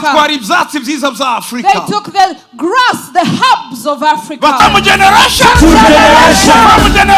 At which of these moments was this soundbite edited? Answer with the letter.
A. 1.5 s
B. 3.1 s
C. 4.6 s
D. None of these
C